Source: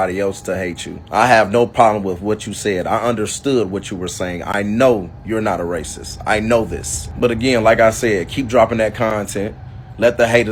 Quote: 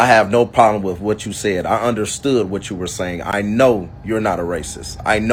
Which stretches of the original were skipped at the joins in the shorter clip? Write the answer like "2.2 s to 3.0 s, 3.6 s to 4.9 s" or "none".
none